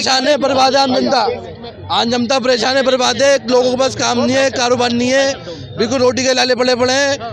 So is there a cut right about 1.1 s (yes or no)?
no